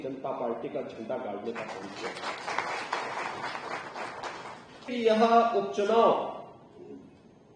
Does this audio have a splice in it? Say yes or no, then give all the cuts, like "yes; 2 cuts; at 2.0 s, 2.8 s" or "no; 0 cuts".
yes; 1 cut; at 4.9 s